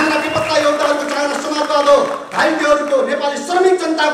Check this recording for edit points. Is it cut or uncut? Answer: uncut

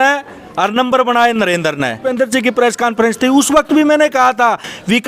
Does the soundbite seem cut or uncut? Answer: cut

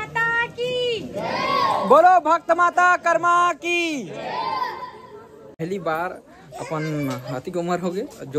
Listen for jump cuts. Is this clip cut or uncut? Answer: cut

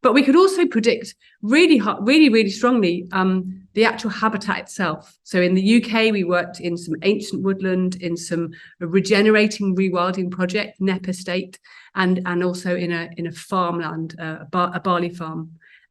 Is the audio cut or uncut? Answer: uncut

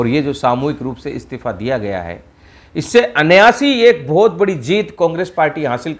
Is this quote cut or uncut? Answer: uncut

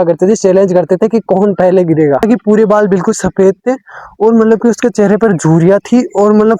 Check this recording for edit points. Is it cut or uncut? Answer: cut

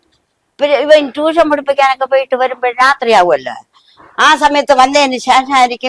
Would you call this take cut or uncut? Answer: uncut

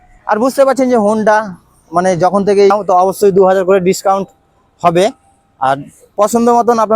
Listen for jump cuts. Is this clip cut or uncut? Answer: cut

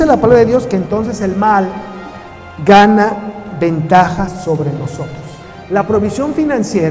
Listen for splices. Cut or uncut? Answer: cut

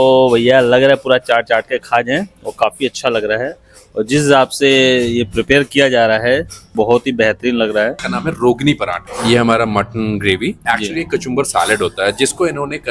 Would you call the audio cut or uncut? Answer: uncut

